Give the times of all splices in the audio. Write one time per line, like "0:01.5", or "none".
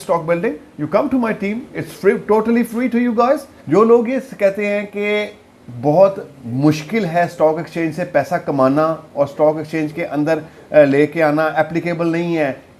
0:03.5